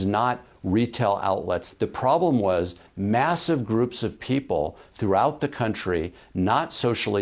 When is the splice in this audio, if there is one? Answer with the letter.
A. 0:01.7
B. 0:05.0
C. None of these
A